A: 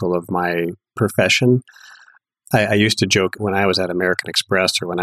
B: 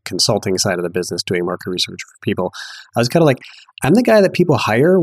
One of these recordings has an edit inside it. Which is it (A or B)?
A